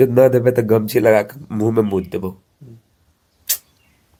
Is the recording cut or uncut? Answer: uncut